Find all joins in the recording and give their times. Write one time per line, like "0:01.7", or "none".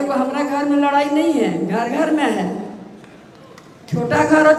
none